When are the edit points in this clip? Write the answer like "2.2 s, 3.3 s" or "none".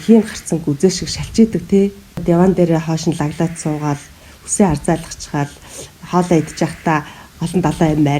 2.2 s

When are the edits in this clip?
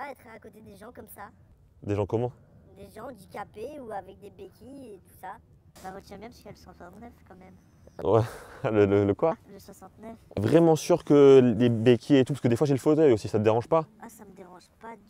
5.7 s, 10.3 s

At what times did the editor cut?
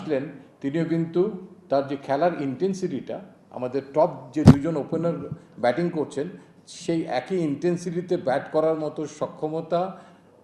none

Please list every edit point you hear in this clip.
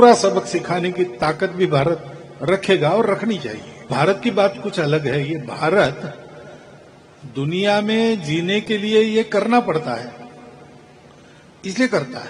3.9 s

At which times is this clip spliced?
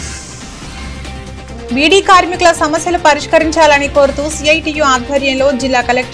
none

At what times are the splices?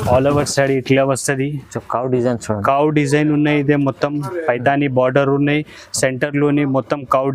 none

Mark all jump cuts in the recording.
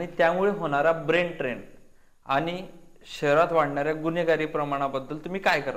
none

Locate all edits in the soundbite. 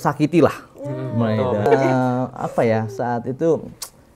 1.7 s

